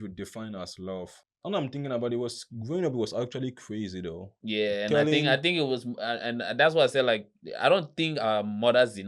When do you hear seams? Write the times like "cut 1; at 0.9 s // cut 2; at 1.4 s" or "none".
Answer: cut 1; at 1.2 s